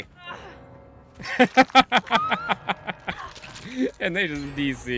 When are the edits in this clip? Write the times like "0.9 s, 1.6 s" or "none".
none